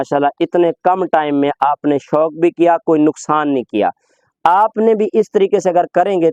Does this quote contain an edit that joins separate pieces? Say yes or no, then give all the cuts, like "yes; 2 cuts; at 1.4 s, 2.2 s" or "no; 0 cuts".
no; 0 cuts